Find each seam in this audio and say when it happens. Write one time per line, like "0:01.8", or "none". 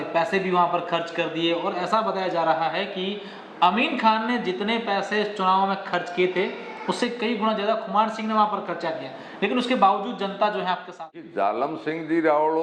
0:11.3